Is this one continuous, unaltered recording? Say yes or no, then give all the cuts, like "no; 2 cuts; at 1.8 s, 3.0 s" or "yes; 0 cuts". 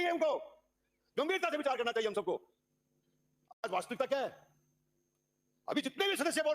yes; 0 cuts